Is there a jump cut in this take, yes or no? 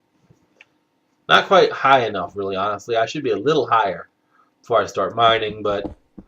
yes